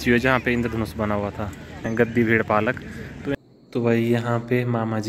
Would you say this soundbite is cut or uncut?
cut